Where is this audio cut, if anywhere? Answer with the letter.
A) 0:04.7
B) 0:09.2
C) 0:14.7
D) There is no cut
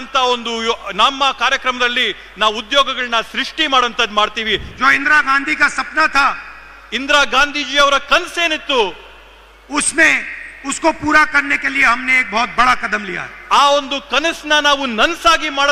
A